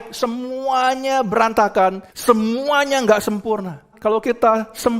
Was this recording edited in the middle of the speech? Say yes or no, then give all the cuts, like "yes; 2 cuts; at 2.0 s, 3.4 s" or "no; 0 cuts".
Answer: yes; 2 cuts; at 2.1 s, 3.9 s